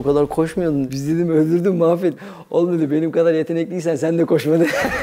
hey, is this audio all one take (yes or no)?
no